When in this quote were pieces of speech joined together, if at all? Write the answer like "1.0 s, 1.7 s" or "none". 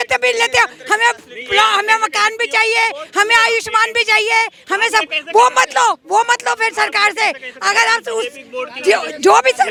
none